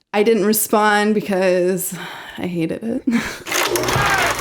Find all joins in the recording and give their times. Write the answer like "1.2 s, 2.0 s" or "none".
3.5 s